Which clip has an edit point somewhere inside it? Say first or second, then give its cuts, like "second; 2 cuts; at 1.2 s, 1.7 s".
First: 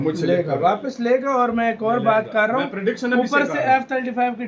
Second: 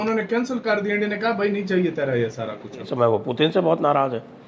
second; 1 cut; at 2.9 s